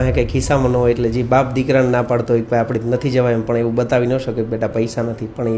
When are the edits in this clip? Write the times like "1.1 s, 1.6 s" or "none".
none